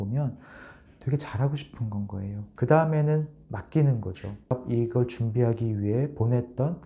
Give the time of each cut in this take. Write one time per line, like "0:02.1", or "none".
0:02.4